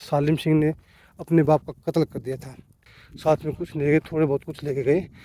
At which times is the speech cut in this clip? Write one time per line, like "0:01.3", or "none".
0:02.9

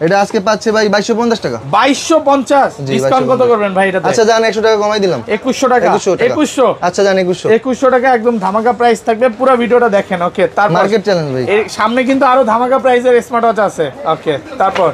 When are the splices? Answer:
none

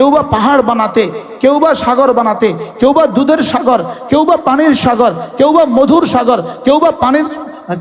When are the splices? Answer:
none

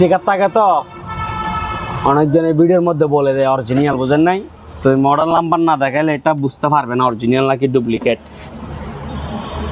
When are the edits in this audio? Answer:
none

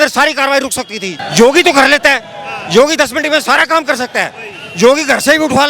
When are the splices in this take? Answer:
0:01.0

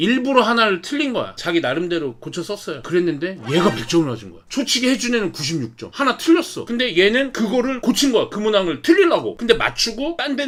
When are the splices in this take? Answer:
none

